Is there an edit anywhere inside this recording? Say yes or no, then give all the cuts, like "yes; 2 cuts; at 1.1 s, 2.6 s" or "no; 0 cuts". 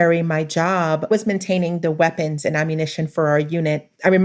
yes; 1 cut; at 1.1 s